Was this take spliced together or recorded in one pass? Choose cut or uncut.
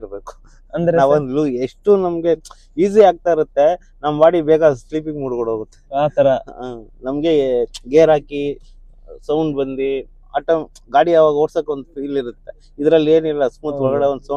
uncut